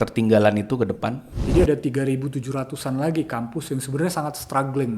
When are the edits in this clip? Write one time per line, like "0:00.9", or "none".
0:01.3